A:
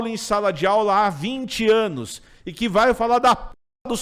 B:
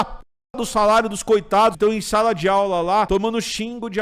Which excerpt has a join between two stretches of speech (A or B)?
B